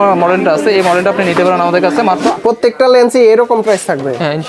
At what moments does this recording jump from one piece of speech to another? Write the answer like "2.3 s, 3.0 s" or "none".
2.3 s